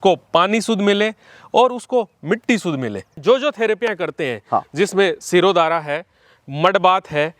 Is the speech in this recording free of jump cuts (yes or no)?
no